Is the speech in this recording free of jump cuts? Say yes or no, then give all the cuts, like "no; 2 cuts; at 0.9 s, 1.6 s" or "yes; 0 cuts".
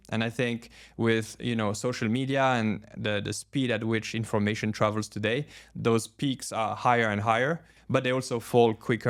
yes; 0 cuts